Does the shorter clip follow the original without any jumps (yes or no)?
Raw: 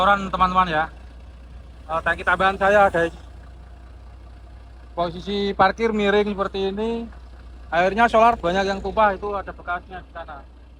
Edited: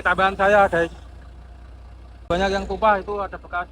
no